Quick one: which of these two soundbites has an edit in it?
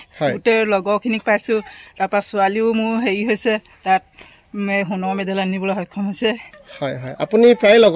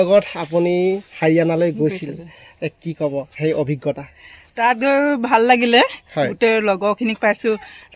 first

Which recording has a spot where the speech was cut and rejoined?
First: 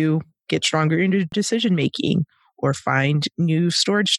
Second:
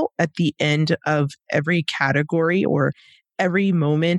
first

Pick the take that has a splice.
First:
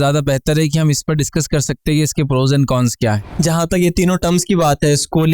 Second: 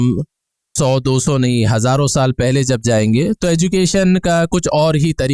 first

